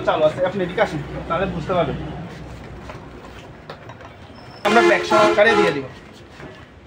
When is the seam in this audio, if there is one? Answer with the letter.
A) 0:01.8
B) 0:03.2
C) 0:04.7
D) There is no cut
C